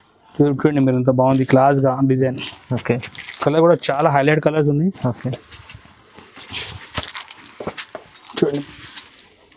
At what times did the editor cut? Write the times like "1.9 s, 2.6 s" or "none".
8.6 s